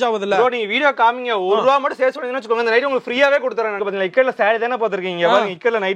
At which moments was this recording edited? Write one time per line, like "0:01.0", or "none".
0:03.8